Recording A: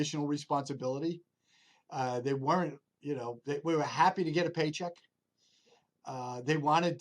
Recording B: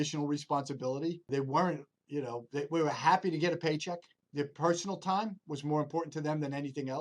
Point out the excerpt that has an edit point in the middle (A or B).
B